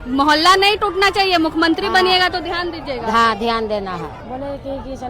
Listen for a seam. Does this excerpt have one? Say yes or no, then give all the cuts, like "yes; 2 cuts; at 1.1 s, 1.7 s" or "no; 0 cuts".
yes; 1 cut; at 4.1 s